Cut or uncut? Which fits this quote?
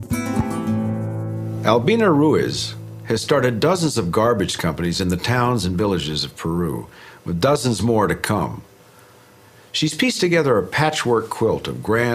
uncut